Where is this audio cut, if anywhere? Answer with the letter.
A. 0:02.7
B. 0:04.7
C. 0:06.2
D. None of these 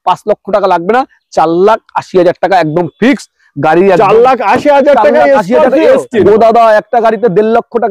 C